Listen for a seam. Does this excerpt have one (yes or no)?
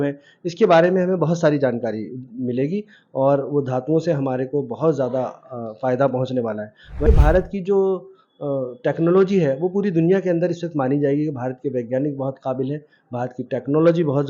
yes